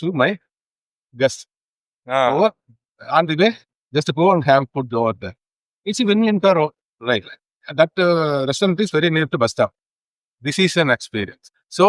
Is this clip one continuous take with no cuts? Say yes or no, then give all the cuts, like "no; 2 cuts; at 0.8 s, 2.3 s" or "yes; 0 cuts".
yes; 0 cuts